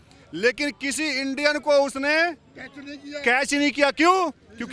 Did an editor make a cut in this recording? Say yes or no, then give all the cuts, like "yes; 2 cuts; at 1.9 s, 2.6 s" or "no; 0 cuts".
no; 0 cuts